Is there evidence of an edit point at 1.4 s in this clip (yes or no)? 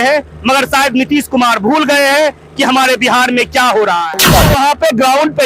no